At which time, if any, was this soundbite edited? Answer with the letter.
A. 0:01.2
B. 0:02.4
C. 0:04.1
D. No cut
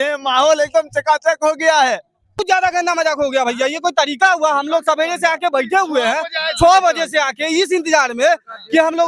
B